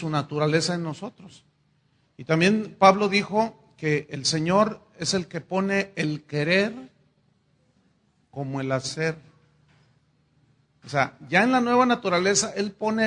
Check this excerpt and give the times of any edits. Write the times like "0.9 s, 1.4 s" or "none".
11.1 s